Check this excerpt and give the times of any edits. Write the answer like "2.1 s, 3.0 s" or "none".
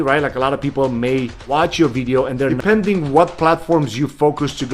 1.4 s, 2.6 s